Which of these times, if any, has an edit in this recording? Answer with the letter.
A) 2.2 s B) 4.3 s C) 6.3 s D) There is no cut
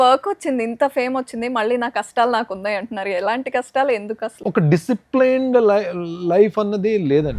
B